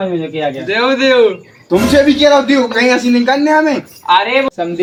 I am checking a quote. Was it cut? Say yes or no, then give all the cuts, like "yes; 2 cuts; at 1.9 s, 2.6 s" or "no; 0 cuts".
no; 0 cuts